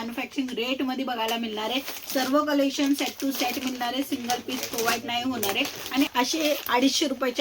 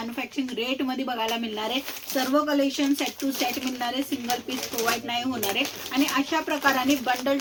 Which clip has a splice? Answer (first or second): first